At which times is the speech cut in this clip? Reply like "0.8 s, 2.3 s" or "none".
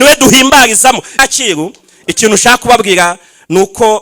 1.1 s